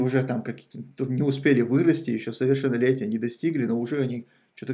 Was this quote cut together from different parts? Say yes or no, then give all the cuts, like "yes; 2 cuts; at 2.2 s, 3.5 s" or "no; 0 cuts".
no; 0 cuts